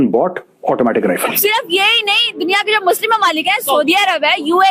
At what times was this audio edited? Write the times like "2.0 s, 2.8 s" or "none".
1.3 s